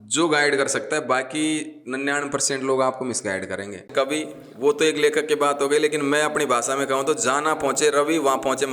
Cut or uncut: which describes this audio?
cut